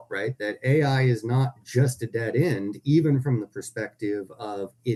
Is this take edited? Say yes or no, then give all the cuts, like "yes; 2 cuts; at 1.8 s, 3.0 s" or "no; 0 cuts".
no; 0 cuts